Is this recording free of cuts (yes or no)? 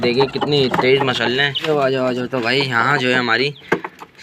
no